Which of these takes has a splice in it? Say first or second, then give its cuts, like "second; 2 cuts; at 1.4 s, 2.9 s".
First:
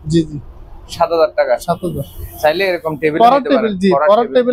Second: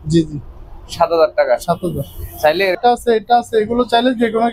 second; 1 cut; at 2.8 s